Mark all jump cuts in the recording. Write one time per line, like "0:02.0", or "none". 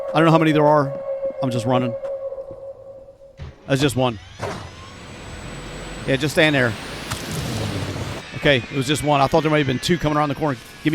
0:08.2